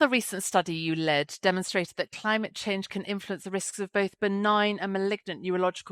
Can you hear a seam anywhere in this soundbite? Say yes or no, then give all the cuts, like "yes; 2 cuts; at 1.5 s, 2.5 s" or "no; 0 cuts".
no; 0 cuts